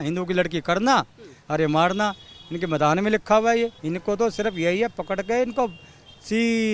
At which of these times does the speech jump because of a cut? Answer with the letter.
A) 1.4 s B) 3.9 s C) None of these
B